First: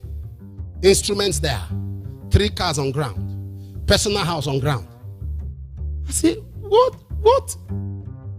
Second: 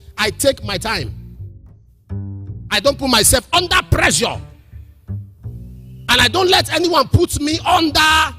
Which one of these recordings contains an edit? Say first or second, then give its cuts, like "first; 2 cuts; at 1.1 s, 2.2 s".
second; 2 cuts; at 1.2 s, 2.7 s